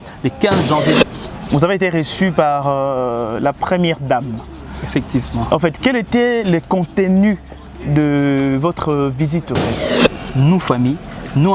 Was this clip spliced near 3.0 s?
no; 2 cuts; at 1.0 s, 9.9 s

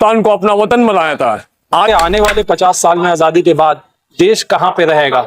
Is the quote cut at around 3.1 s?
no; 1 cut; at 1.9 s

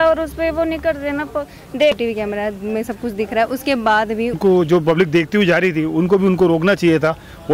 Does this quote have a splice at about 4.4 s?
yes; 2 cuts; at 2.0 s, 4.4 s

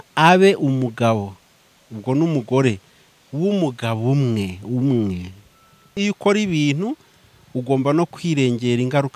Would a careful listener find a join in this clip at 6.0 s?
yes; 1 cut; at 6.0 s

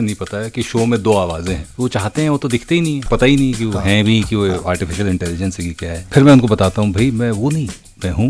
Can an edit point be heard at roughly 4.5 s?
no; 3 cuts; at 1.7 s, 3.0 s, 6.1 s

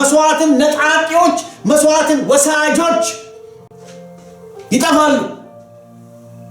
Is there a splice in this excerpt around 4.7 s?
yes; 1 cut; at 4.7 s

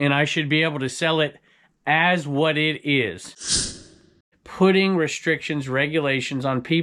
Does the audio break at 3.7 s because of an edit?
yes; 1 cut; at 3.7 s

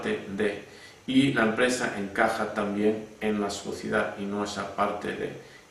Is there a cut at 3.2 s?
no; 0 cuts

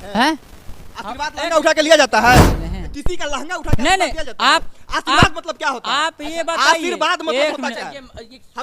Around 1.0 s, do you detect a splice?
no; 1 cut; at 2.6 s

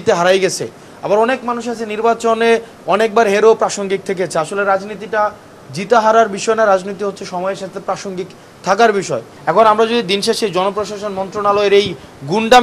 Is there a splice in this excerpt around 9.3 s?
yes; 1 cut; at 9.3 s

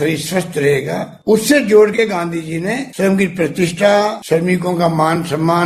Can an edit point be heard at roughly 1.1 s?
yes; 3 cuts; at 1.1 s, 2.9 s, 4.2 s

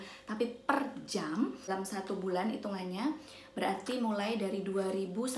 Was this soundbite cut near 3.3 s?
no; 1 cut; at 1.7 s

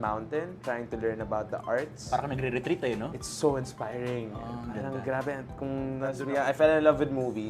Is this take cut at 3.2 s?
no; 1 cut; at 6.1 s

